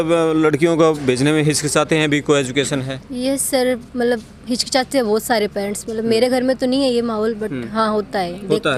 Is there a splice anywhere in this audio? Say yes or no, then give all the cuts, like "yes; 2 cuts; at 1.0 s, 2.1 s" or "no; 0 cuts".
no; 0 cuts